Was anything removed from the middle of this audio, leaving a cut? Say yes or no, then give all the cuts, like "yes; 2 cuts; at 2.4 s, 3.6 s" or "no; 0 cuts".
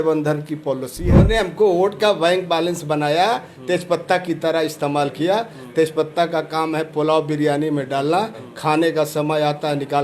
yes; 1 cut; at 1.1 s